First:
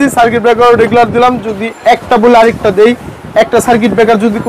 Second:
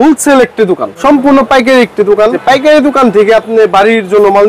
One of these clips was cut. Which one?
second; 2 cuts; at 0.9 s, 2.4 s

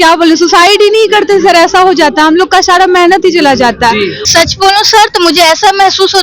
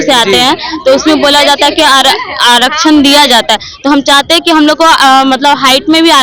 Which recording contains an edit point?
first; 1 cut; at 4.2 s

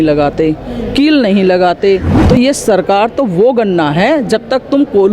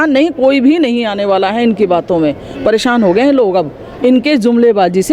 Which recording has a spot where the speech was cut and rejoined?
first; 1 cut; at 2.1 s

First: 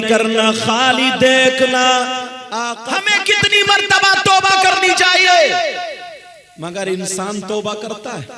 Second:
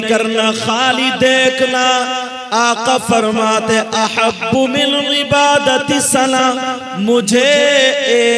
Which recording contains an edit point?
first; 1 cut; at 2.4 s

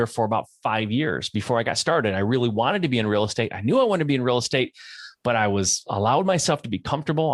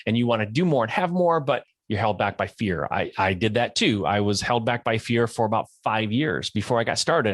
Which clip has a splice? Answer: second; 1 cut; at 1.7 s

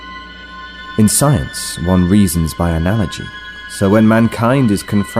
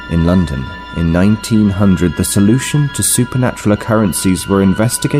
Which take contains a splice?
first; 1 cut; at 0.9 s

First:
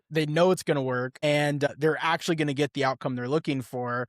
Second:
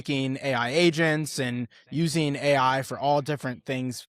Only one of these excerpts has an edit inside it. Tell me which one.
first; 1 cut; at 1.2 s

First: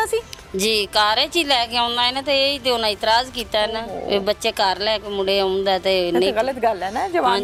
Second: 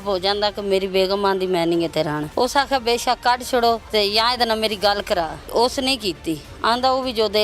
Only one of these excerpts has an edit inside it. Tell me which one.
second; 3 cuts; at 2.2 s, 3.8 s, 5.5 s

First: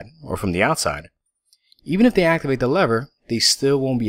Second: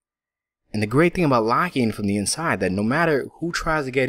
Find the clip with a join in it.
second; 1 cut; at 1.9 s

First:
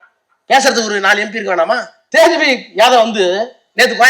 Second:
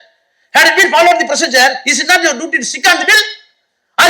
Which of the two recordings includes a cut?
first; 1 cut; at 1.9 s

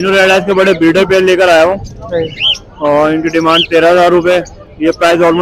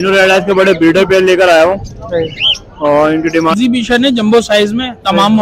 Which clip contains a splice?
second; 1 cut; at 3.5 s

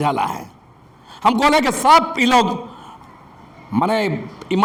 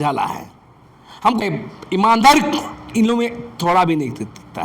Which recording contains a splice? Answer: second; 1 cut; at 1.4 s

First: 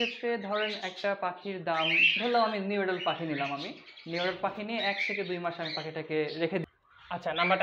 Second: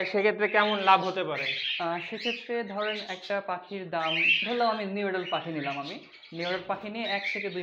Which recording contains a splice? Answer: first; 1 cut; at 6.6 s

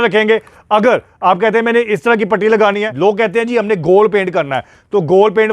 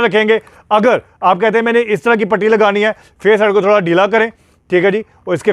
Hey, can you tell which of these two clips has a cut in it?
first; 1 cut; at 2.9 s

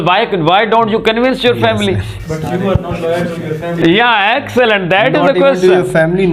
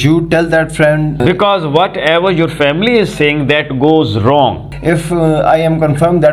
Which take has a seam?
second; 2 cuts; at 1.1 s, 4.7 s

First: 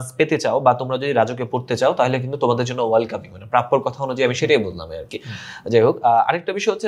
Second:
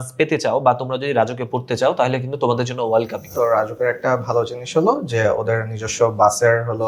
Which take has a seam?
second; 1 cut; at 3.2 s

